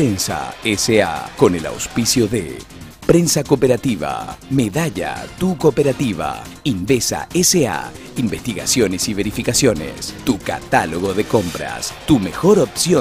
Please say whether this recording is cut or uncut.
cut